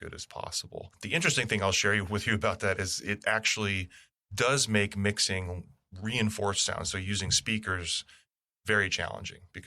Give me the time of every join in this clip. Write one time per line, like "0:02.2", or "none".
0:00.9